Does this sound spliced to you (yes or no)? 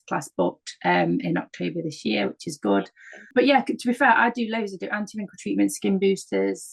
yes